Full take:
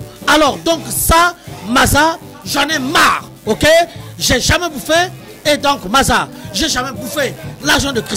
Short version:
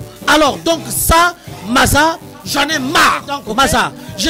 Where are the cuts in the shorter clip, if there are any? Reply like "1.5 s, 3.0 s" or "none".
3.4 s